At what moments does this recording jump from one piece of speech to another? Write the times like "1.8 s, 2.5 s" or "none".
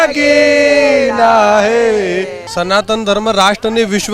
2.4 s

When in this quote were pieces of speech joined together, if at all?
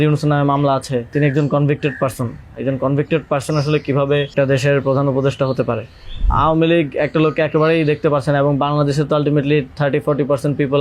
1.1 s, 4.3 s, 6.2 s

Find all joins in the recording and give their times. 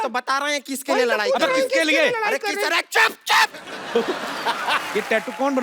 1.2 s, 4.9 s

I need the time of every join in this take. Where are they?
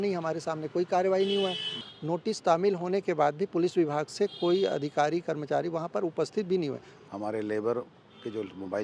1.8 s, 6.9 s

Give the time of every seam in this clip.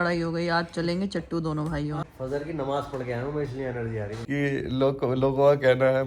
2.0 s, 4.2 s

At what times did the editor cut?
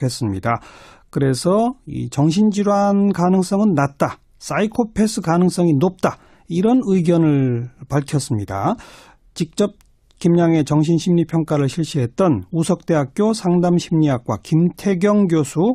none

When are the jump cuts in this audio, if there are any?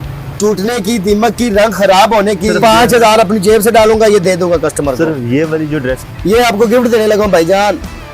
2.5 s, 6.0 s

